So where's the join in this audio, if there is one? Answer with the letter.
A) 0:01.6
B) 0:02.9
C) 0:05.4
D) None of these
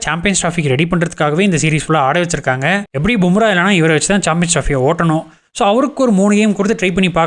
B